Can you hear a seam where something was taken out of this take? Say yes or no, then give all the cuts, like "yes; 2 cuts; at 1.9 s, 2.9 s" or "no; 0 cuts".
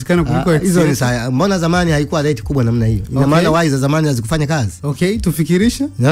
no; 0 cuts